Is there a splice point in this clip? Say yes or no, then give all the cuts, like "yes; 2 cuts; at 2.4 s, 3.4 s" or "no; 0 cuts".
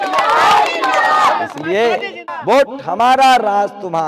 yes; 1 cut; at 2.3 s